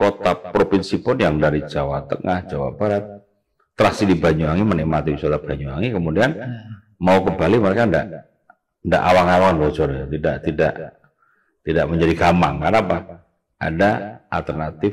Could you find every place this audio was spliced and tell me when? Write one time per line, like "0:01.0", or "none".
none